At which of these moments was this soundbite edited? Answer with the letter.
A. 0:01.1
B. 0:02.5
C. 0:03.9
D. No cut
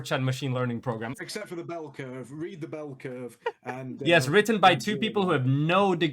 A